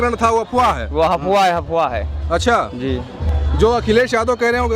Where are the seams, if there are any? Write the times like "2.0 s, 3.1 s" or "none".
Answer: none